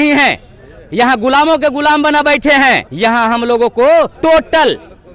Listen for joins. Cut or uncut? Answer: cut